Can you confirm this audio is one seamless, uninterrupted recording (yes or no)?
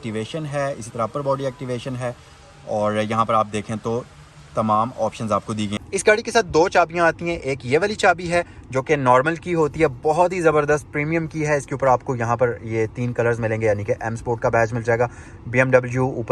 no